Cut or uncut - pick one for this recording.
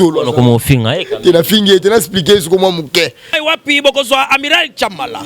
cut